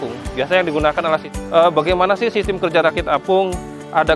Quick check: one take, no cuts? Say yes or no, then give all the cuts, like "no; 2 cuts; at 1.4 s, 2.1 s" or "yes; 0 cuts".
no; 1 cut; at 1.3 s